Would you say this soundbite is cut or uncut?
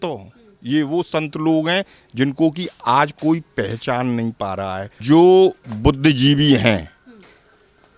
cut